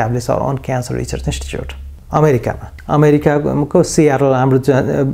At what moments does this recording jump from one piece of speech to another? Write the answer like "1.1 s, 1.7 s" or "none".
none